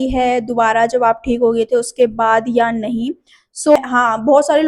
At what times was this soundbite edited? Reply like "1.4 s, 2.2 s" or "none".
3.8 s